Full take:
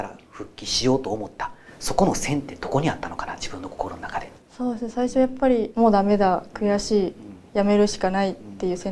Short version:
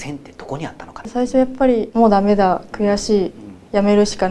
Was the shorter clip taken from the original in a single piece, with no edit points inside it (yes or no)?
no